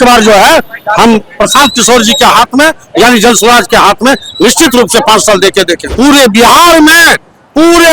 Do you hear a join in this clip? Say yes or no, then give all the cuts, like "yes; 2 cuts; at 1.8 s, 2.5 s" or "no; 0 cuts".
yes; 1 cut; at 5.8 s